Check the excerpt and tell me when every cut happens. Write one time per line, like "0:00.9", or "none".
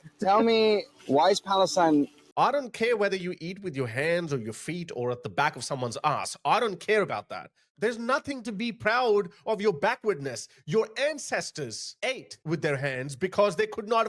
0:02.2
0:07.7